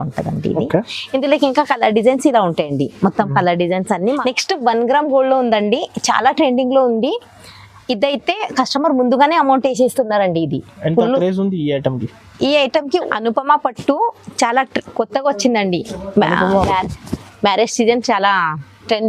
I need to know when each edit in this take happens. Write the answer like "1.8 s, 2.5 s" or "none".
4.2 s, 12.9 s